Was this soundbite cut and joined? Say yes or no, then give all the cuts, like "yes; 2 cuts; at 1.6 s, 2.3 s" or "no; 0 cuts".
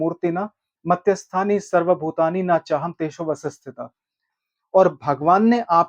yes; 1 cut; at 4.3 s